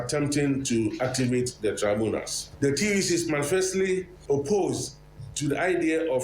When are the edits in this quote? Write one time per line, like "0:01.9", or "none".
0:02.4
0:04.1